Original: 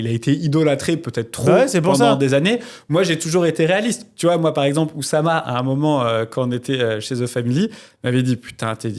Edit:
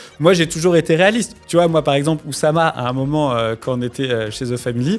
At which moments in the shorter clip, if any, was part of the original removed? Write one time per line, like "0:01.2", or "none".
none